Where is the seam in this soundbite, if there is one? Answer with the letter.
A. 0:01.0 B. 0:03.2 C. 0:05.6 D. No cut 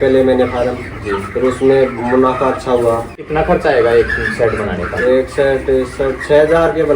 B